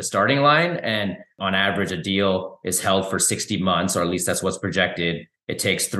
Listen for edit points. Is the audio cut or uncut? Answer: cut